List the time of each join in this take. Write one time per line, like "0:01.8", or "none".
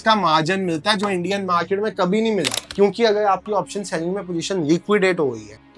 0:02.6